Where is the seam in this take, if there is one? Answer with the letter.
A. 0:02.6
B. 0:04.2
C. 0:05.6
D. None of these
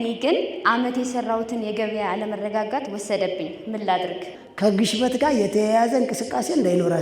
B